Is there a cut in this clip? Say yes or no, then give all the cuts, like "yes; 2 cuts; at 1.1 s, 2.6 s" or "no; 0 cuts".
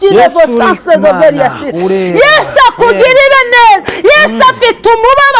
no; 0 cuts